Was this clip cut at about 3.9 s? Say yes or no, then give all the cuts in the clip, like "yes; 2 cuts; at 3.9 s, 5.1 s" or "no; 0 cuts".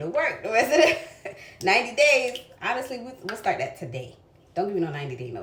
no; 0 cuts